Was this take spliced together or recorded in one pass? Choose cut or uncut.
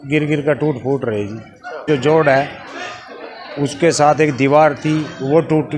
uncut